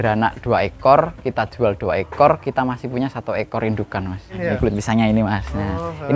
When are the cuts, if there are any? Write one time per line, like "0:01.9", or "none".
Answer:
0:04.3